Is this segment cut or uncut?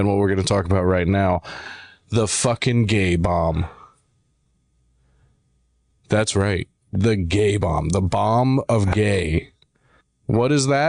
uncut